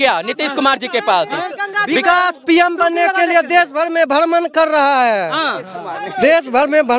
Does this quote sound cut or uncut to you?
uncut